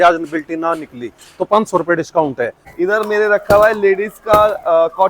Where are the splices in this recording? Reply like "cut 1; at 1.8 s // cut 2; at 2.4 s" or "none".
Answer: cut 1; at 2.6 s